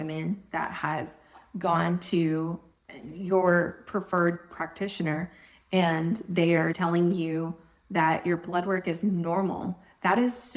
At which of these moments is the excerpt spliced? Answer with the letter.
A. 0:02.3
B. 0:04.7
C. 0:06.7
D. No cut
C